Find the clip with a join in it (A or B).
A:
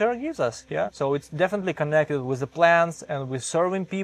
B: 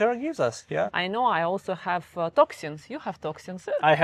B